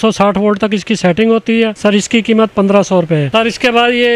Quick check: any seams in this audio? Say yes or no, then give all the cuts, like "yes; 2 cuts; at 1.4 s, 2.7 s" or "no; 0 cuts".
no; 0 cuts